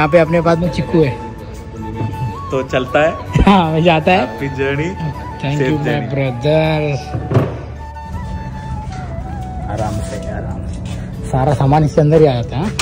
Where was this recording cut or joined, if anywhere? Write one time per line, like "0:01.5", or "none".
0:07.9